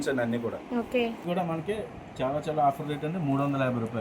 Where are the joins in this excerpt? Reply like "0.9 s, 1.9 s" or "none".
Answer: 1.2 s